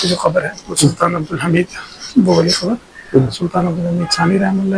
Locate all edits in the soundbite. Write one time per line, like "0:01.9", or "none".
none